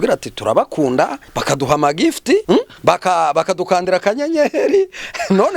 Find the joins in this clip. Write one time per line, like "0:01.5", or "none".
0:01.3
0:02.5